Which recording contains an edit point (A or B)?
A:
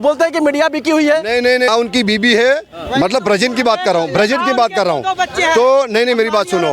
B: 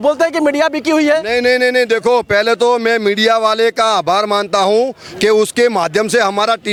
A